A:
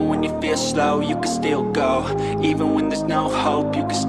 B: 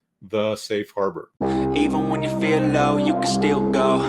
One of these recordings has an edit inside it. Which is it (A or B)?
B